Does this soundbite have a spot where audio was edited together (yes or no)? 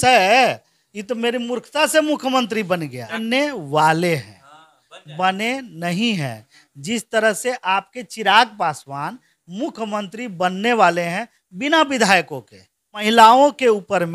yes